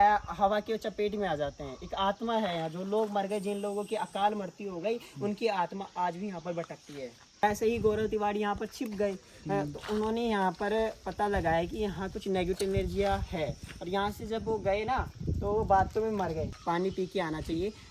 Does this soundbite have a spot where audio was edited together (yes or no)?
yes